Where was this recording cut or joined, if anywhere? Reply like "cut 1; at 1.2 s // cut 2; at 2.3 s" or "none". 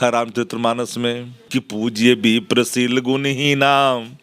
cut 1; at 1.5 s